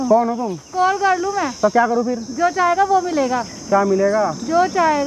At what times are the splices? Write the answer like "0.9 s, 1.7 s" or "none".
none